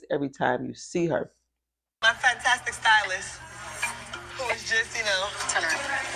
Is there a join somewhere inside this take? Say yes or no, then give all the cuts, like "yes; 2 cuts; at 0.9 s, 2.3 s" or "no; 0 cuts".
no; 0 cuts